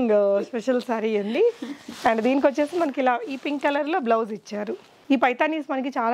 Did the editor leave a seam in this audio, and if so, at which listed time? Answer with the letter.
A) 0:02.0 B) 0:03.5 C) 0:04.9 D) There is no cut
C